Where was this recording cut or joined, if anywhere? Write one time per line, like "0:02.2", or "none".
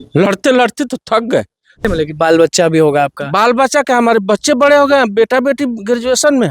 0:01.8